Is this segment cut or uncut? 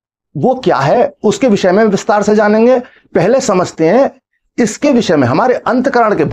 uncut